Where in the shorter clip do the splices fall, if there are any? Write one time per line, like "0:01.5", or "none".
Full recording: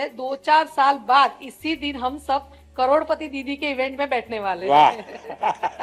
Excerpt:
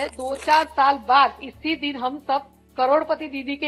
none